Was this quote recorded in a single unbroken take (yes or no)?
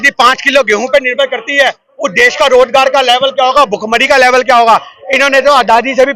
yes